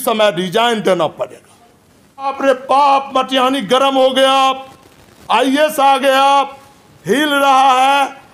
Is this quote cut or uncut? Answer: cut